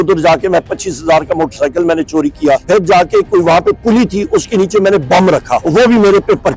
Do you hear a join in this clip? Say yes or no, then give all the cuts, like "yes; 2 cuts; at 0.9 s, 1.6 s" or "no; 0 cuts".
yes; 2 cuts; at 2.6 s, 5.6 s